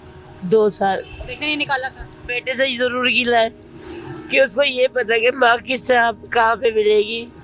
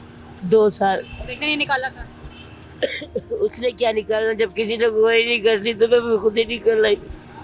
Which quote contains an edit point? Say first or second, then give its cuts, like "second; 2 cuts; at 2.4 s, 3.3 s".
first; 1 cut; at 2.3 s